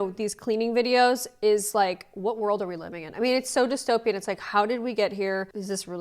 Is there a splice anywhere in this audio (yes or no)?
no